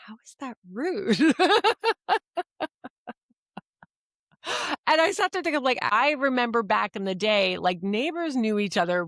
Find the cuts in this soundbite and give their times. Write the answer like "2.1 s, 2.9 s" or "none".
5.9 s